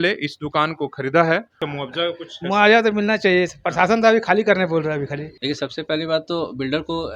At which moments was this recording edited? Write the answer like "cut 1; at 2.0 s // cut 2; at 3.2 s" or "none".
cut 1; at 1.7 s // cut 2; at 5.3 s